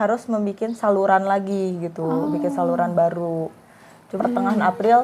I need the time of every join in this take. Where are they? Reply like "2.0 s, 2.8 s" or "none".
4.1 s